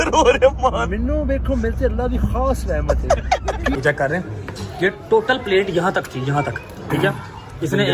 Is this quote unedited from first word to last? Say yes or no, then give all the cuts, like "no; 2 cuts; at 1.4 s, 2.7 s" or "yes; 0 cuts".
no; 1 cut; at 3.8 s